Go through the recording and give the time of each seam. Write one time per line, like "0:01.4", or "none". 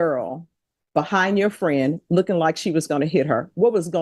none